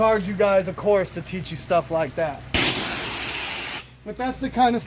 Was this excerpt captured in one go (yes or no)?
yes